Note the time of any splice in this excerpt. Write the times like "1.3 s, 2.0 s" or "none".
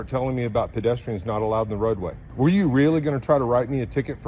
2.2 s